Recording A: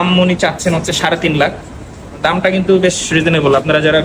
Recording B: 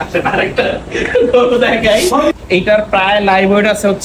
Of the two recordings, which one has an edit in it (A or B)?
B